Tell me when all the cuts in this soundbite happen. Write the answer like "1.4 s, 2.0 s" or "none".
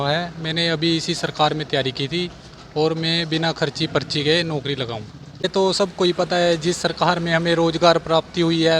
5.4 s